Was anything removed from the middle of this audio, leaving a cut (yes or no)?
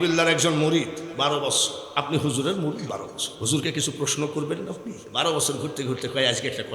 yes